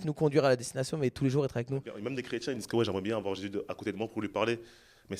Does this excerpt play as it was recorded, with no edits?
no; 1 cut; at 1.9 s

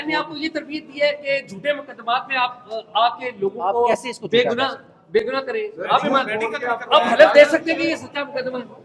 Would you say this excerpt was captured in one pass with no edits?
yes; 0 cuts

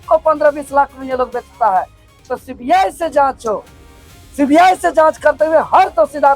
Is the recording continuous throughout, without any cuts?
no; 1 cut; at 2.2 s

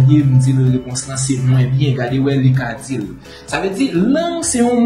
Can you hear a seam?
no; 0 cuts

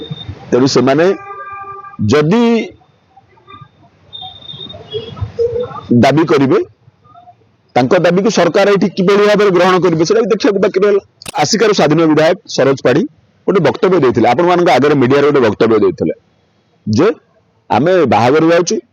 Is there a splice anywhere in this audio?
yes; 1 cut; at 11.4 s

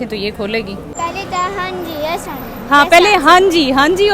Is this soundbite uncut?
no; 1 cut; at 1.0 s

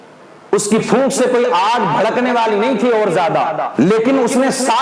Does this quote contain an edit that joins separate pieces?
yes; 1 cut; at 3.7 s

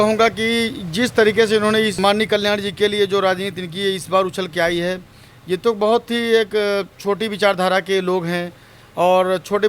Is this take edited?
yes; 1 cut; at 1.9 s

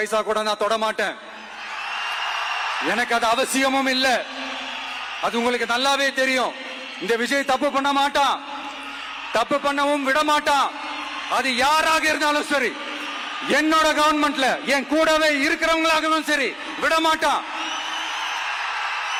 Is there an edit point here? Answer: no; 0 cuts

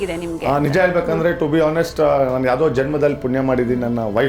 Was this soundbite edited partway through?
no; 0 cuts

